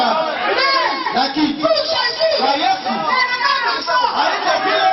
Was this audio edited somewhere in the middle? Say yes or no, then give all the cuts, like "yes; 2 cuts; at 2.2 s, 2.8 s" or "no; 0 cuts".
no; 0 cuts